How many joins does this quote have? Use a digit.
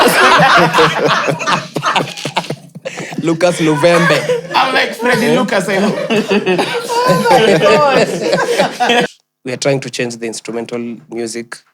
1